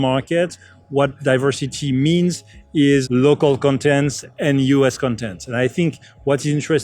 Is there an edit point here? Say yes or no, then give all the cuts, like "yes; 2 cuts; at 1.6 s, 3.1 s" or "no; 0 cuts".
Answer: yes; 1 cut; at 3.0 s